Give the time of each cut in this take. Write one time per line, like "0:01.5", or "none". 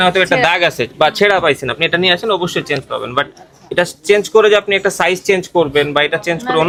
none